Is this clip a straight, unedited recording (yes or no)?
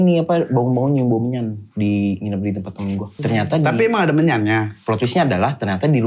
no